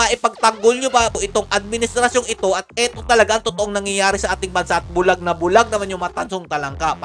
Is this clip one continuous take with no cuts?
yes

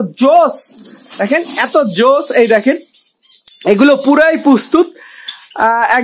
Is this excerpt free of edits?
yes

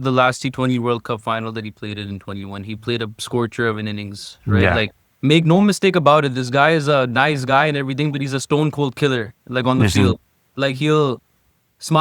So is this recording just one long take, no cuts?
yes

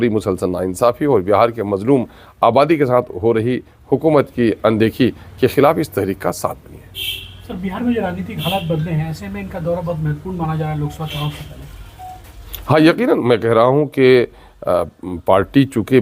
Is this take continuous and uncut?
yes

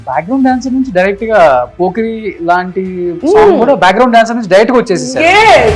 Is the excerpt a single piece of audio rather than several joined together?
yes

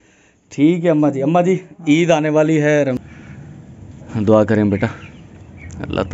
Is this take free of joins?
no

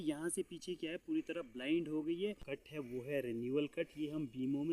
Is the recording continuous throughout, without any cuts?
no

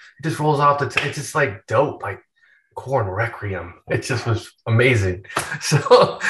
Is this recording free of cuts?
yes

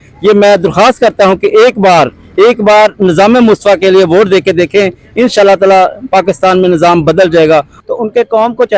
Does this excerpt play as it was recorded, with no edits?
no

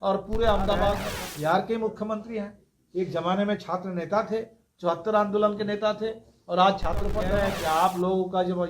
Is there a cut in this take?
yes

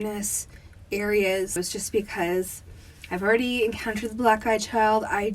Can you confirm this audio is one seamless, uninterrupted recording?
no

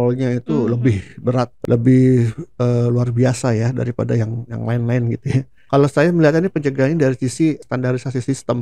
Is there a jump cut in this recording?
yes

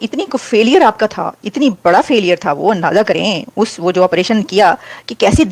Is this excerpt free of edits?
yes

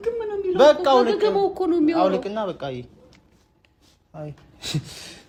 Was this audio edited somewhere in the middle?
no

